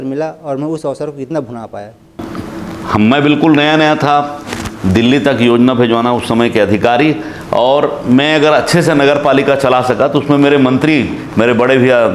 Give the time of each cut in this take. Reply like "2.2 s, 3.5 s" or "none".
2.2 s